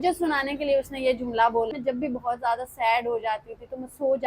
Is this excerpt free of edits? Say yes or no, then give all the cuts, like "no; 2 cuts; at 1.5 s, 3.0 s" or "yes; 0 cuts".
no; 1 cut; at 1.7 s